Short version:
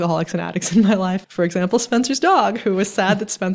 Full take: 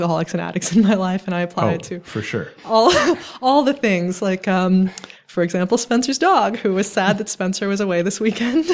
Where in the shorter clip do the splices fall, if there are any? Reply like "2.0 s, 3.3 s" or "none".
1.2 s